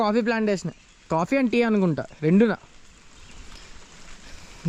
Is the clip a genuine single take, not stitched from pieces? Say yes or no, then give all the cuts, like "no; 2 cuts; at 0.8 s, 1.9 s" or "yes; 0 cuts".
yes; 0 cuts